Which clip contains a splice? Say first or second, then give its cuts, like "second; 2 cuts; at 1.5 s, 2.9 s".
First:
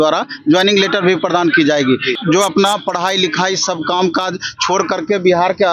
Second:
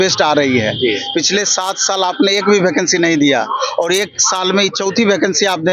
first; 1 cut; at 2.2 s